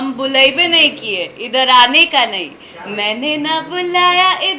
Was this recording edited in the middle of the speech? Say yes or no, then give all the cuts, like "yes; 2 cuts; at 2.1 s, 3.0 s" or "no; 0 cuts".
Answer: no; 0 cuts